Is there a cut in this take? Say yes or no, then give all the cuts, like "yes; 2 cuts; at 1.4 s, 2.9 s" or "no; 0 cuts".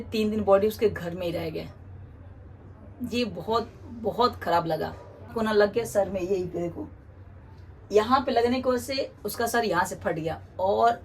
yes; 1 cut; at 5.3 s